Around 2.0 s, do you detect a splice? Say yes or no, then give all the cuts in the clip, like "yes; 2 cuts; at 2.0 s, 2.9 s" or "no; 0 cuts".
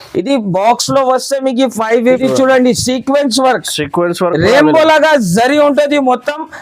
yes; 1 cut; at 2.0 s